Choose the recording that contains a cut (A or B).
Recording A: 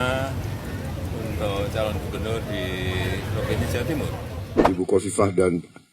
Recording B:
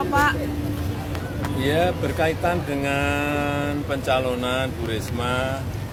A